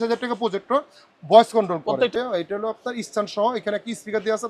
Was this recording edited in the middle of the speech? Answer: yes; 1 cut; at 2.1 s

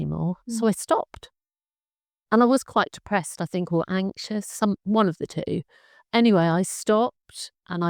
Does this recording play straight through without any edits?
yes; 0 cuts

